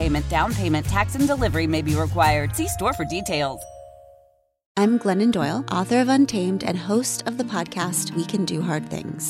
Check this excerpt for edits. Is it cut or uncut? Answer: cut